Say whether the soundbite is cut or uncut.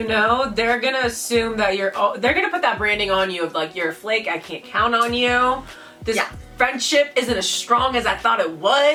uncut